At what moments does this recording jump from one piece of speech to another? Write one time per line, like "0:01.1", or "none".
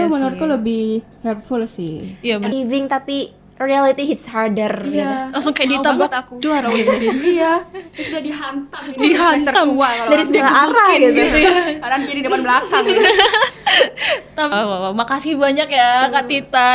0:02.5
0:14.5